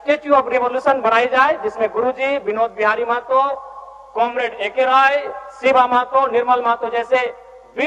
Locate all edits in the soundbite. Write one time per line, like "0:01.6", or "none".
none